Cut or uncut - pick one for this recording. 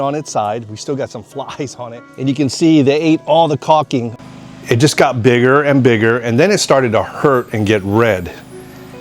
cut